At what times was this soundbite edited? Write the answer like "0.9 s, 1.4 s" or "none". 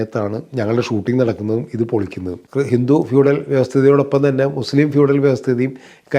2.4 s